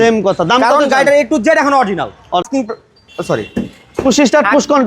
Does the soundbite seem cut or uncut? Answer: cut